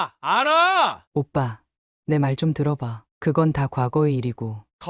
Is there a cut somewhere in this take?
yes; 1 cut; at 1.0 s

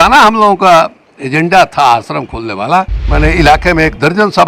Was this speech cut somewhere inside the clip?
yes; 1 cut; at 3.0 s

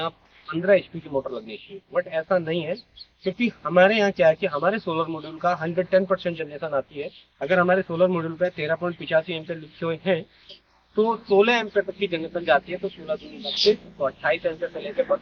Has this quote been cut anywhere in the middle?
no; 0 cuts

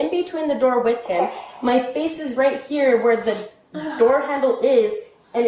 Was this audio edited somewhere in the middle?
no; 0 cuts

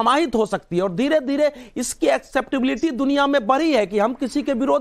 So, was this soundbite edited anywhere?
no; 0 cuts

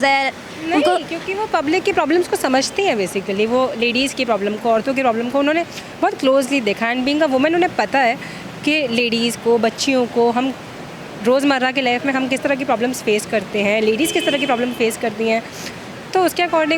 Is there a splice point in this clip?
no; 0 cuts

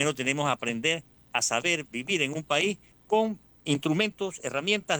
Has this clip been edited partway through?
yes; 2 cuts; at 1.1 s, 3.0 s

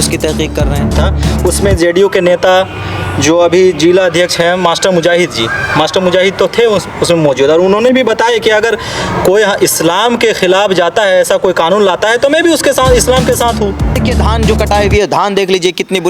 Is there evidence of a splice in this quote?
yes; 2 cuts; at 1.0 s, 14.0 s

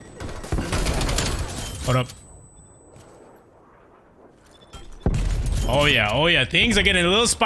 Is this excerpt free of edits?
yes; 0 cuts

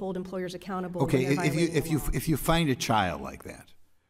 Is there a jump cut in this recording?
yes; 1 cut; at 0.9 s

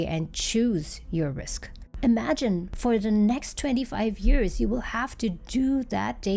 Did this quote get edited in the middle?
yes; 1 cut; at 1.8 s

